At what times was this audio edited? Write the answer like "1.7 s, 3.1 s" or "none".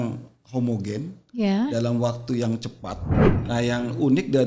3.1 s

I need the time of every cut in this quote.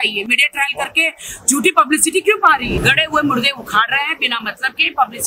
2.8 s

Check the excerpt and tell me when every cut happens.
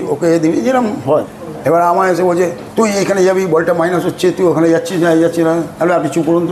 1.3 s

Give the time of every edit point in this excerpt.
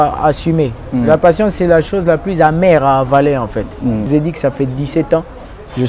4.1 s

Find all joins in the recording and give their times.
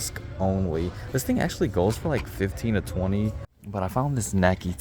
3.5 s

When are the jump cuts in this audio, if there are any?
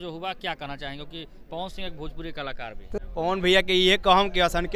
3.0 s

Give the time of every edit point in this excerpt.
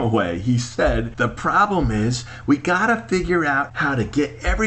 1.1 s, 3.7 s

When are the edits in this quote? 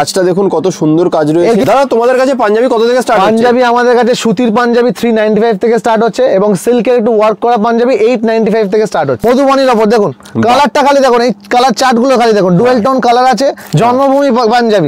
1.6 s, 9.2 s, 13.6 s

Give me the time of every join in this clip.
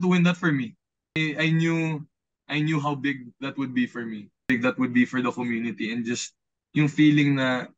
1.2 s, 4.5 s

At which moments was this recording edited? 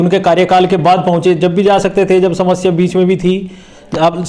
none

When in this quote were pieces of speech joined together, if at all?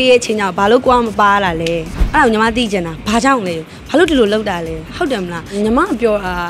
1.9 s, 5.5 s

